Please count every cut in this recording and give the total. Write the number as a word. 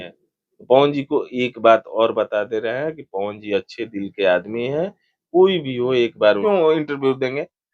one